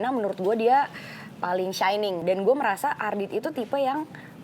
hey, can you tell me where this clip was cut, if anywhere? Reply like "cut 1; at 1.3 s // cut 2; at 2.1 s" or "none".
cut 1; at 2.2 s